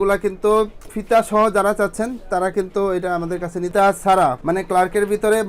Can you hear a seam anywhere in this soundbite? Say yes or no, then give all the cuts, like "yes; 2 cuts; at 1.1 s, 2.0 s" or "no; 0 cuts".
yes; 1 cut; at 3.7 s